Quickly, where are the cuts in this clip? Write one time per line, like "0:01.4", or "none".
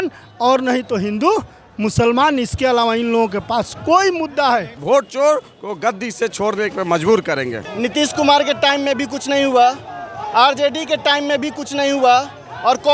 0:04.7
0:07.6

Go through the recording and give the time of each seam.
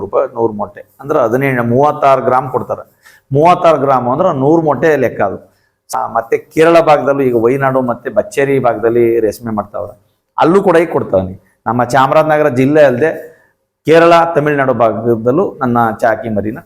0:05.9

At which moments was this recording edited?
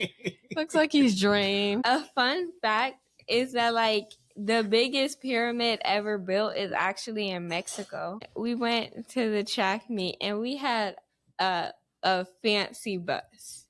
0:01.8
0:08.3

